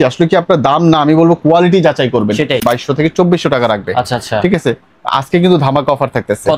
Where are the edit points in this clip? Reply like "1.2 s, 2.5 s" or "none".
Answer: 2.6 s